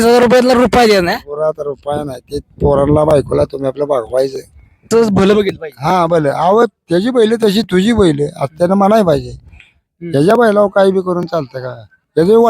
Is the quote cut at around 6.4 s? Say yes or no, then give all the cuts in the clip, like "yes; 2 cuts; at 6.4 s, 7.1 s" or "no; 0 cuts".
no; 1 cut; at 4.8 s